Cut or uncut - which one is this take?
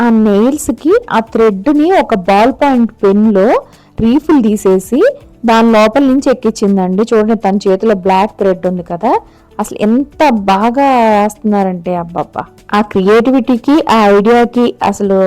uncut